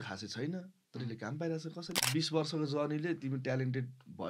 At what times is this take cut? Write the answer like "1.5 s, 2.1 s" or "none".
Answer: 2.0 s